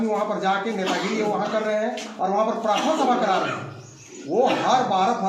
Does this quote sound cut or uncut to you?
uncut